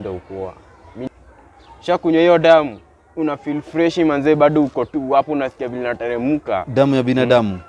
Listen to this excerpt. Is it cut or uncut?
cut